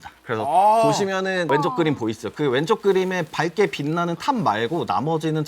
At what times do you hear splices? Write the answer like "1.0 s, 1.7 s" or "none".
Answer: 1.5 s

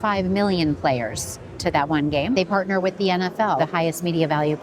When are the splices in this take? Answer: 2.4 s, 3.6 s

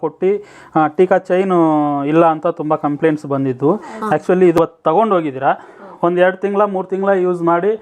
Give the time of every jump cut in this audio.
4.6 s

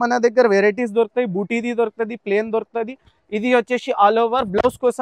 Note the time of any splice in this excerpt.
none

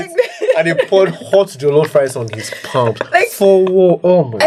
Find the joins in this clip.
none

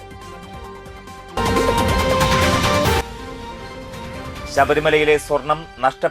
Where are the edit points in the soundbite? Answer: 1.3 s

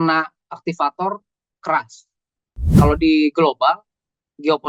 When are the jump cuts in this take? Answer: 2.7 s

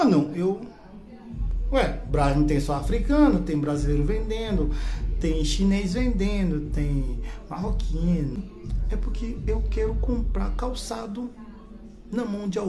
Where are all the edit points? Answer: 8.4 s

